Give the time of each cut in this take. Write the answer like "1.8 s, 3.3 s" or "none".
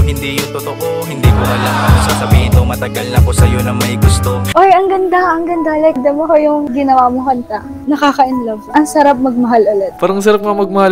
4.5 s